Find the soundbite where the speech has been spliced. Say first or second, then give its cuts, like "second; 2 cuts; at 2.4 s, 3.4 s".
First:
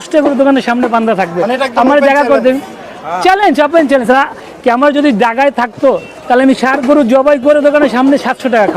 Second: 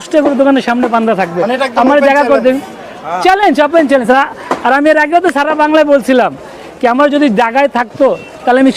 first; 1 cut; at 4.4 s